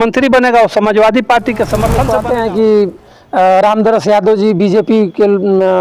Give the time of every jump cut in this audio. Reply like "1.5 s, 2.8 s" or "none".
2.0 s